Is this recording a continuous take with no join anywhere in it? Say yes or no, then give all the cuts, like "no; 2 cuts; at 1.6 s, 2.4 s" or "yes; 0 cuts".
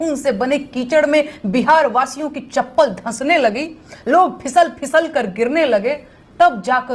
yes; 0 cuts